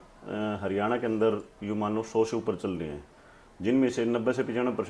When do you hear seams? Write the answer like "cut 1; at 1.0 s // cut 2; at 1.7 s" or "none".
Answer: none

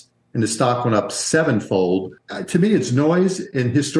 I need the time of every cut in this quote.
cut 1; at 2.1 s

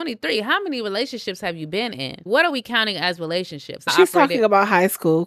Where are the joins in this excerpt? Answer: cut 1; at 2.2 s // cut 2; at 3.9 s

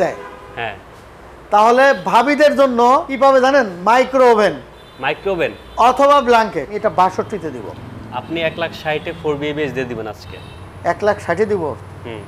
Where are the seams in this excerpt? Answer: cut 1; at 3.1 s // cut 2; at 6.9 s

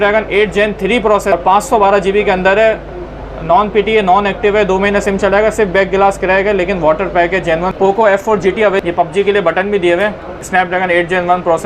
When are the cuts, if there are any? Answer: cut 1; at 1.3 s // cut 2; at 7.7 s // cut 3; at 8.8 s // cut 4; at 10.4 s

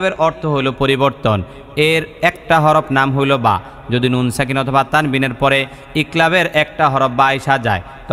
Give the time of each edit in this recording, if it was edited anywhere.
none

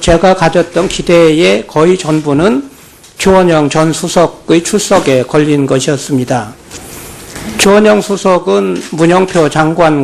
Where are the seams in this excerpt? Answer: cut 1; at 2.3 s

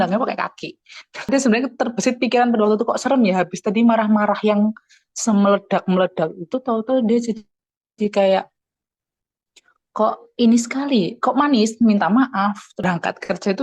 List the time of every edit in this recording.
cut 1; at 1.3 s // cut 2; at 12.7 s

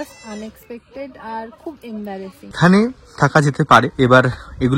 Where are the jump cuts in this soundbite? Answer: cut 1; at 2.6 s // cut 2; at 3.9 s

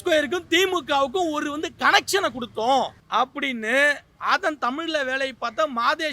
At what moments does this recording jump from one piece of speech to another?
cut 1; at 3.0 s // cut 2; at 4.1 s

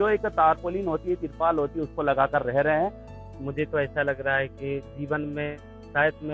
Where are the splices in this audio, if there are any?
cut 1; at 3.0 s

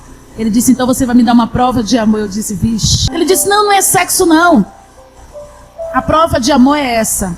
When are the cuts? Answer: cut 1; at 3.0 s

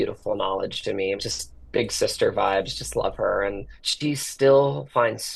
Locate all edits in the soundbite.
none

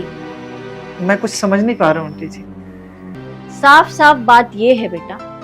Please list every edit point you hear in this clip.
cut 1; at 3.1 s

